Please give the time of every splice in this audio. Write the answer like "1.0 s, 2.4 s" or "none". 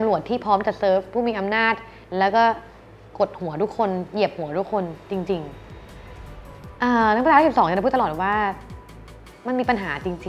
6.1 s